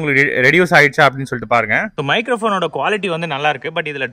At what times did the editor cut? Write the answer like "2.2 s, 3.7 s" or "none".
2.0 s